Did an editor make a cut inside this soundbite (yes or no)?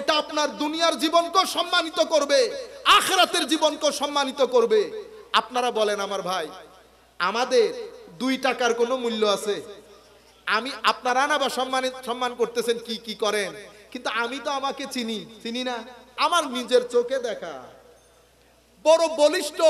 yes